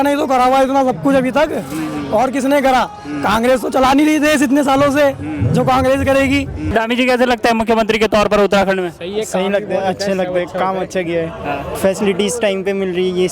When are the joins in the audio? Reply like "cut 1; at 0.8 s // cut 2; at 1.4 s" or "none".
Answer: cut 1; at 6.7 s // cut 2; at 11.7 s